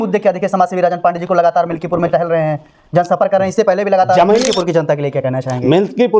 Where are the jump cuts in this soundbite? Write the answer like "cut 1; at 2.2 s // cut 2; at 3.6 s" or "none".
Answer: cut 1; at 4.4 s